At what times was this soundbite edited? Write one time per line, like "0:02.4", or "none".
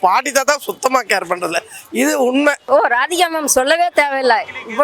0:02.6